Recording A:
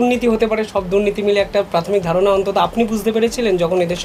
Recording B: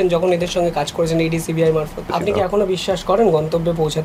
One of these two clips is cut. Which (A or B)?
B